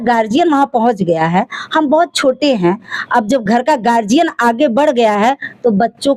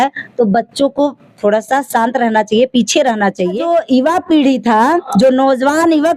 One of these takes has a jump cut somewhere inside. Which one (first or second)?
second